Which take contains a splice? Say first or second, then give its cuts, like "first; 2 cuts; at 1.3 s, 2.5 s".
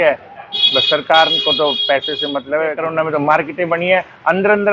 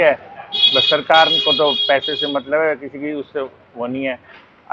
first; 1 cut; at 2.8 s